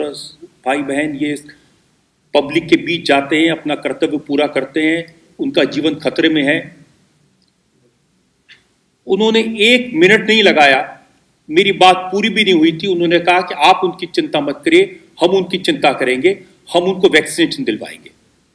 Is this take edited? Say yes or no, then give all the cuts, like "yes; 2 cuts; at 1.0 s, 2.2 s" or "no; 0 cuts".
no; 0 cuts